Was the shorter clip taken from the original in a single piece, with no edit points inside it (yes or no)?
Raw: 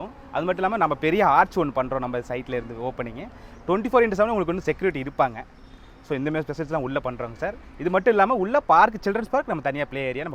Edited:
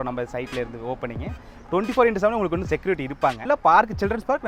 no